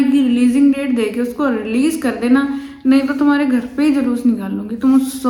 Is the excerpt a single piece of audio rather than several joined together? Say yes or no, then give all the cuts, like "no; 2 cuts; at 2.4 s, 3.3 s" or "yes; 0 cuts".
yes; 0 cuts